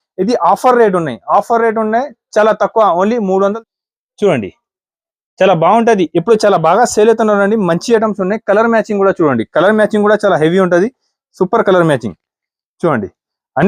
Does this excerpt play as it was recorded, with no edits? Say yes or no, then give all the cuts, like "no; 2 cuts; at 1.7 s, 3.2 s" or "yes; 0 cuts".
no; 1 cut; at 3.6 s